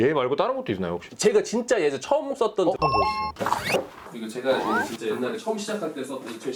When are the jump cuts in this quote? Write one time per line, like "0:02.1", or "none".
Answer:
0:02.7
0:04.0